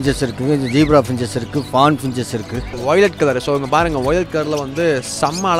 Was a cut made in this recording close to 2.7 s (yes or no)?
yes